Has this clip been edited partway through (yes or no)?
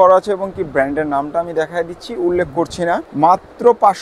yes